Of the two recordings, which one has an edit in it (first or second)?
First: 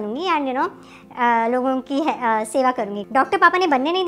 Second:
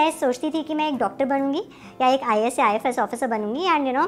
first